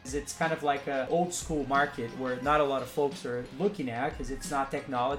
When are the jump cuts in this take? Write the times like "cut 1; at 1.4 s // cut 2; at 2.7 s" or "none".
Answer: cut 1; at 1.1 s // cut 2; at 3.5 s